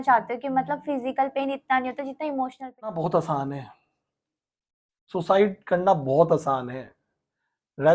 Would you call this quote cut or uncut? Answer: cut